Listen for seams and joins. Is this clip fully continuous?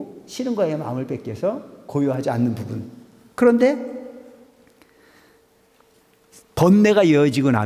yes; 0 cuts

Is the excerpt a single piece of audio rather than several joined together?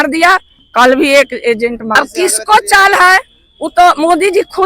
no; 1 cut; at 1.9 s

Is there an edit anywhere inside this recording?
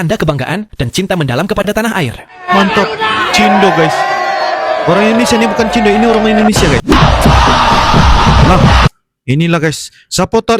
yes; 1 cut; at 6.8 s

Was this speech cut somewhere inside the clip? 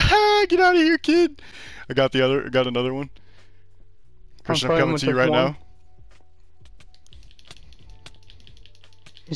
no; 0 cuts

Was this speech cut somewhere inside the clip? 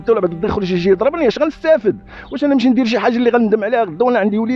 no; 0 cuts

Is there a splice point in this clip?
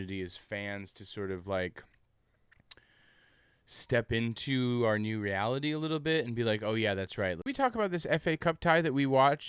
yes; 1 cut; at 7.4 s

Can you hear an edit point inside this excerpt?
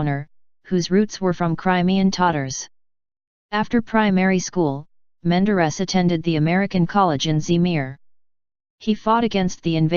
yes; 1 cut; at 1.1 s

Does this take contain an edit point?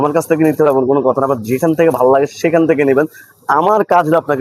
no; 0 cuts

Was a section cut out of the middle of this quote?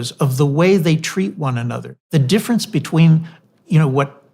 yes; 1 cut; at 2.1 s

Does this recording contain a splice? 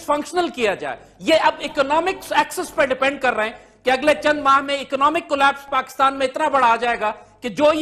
no; 0 cuts

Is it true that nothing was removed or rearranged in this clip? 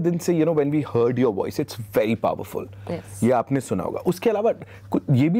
yes; 0 cuts

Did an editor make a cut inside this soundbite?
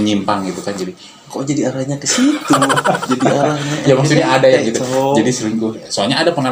no; 0 cuts

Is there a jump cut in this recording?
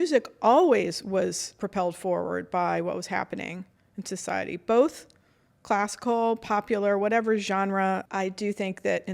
yes; 2 cuts; at 1.6 s, 8.0 s

